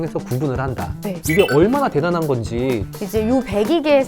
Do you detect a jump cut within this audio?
yes; 2 cuts; at 1.2 s, 2.9 s

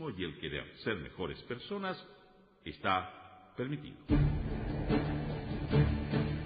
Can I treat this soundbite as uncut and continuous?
no; 1 cut; at 4.0 s

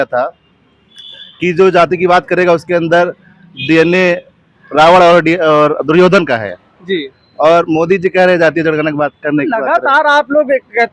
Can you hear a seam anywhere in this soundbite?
no; 0 cuts

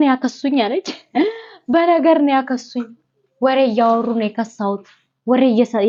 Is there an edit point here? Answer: no; 0 cuts

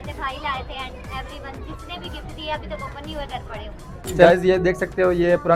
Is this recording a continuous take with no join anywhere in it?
no; 1 cut; at 4.3 s

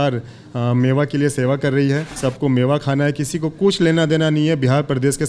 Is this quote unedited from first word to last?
no; 1 cut; at 2.1 s

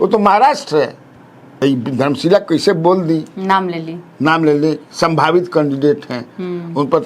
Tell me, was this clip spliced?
yes; 1 cut; at 1.6 s

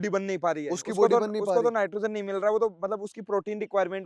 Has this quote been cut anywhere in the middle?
no; 0 cuts

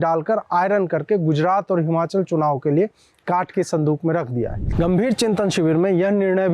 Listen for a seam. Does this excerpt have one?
yes; 1 cut; at 4.6 s

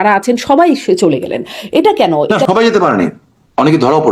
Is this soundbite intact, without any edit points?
no; 1 cut; at 2.3 s

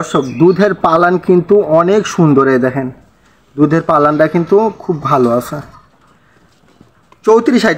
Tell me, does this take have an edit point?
no; 0 cuts

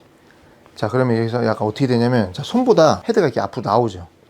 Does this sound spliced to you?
yes; 1 cut; at 3.0 s

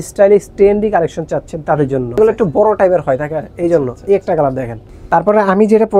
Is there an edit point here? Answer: yes; 2 cuts; at 2.2 s, 5.0 s

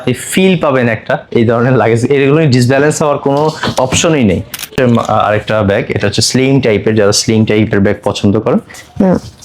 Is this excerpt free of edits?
no; 1 cut; at 4.7 s

